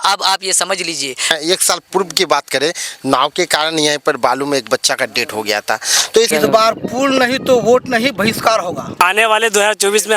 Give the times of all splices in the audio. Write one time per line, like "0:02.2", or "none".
0:01.3
0:06.3
0:09.0